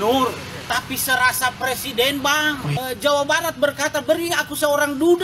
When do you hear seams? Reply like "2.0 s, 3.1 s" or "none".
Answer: 2.8 s